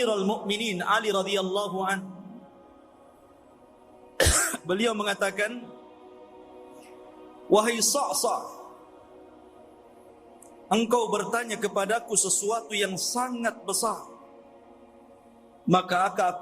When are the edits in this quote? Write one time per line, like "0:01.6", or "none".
0:02.7
0:04.1
0:06.0
0:07.5
0:08.7
0:10.7